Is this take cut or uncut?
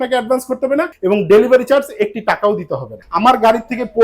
cut